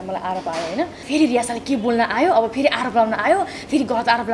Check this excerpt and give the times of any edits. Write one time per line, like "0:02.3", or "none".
0:01.0